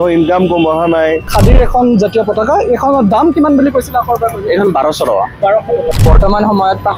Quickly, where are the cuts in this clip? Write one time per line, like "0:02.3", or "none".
0:01.3
0:05.9